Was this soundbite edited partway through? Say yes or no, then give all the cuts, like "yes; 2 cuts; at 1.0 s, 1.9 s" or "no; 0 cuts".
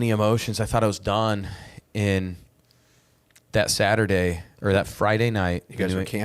no; 0 cuts